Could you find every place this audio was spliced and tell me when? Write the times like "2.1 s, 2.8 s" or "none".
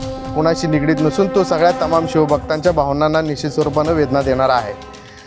none